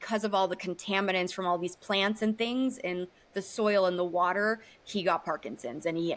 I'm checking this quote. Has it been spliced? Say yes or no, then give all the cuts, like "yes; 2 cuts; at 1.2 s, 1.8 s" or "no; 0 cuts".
no; 0 cuts